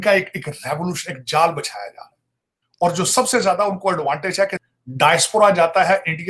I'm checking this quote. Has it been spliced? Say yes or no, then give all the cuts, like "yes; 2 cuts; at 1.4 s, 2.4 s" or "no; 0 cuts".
yes; 1 cut; at 4.6 s